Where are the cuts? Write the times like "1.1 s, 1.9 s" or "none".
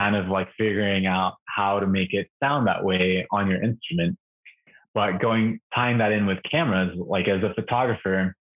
4.8 s